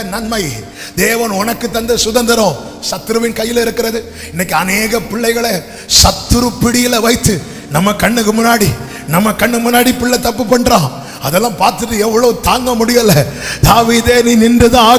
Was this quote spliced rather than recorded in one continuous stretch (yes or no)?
no